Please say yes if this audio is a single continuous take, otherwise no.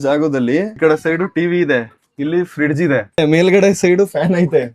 no